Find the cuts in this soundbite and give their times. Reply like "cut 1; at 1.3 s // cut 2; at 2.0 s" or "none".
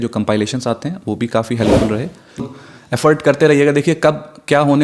cut 1; at 2.6 s